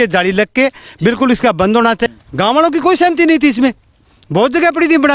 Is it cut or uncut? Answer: cut